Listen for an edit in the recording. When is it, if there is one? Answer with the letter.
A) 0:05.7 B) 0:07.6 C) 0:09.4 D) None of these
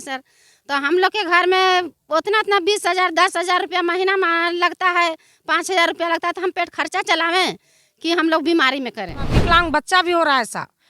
C